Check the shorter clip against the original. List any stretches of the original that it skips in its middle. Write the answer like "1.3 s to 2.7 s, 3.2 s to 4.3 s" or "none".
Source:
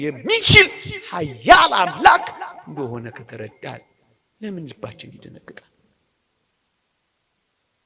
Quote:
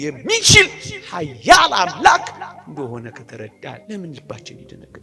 3.8 s to 4.3 s